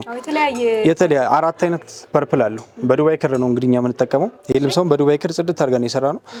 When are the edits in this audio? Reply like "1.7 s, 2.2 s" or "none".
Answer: none